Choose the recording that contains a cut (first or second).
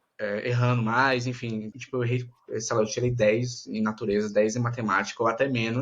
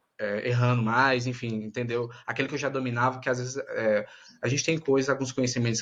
first